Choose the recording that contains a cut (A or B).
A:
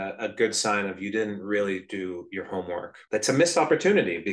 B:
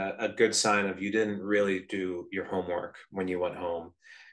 A